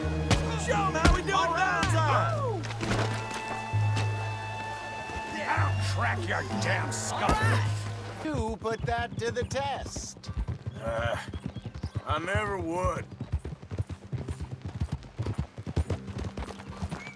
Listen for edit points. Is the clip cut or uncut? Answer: cut